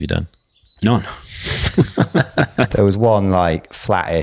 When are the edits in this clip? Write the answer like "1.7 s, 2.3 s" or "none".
2.7 s